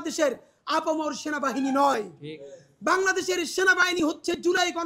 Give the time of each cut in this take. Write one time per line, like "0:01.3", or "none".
none